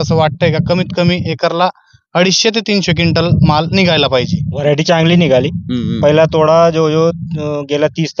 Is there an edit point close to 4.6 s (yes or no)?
yes